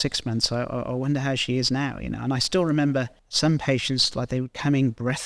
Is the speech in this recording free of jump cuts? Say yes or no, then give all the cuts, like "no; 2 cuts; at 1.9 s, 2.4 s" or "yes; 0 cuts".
no; 1 cut; at 3.2 s